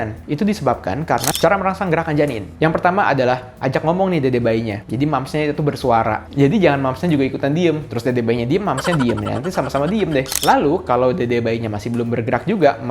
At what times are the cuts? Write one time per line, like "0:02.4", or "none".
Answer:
0:01.3
0:10.3